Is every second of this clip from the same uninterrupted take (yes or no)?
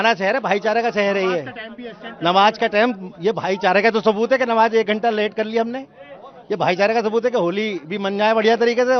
yes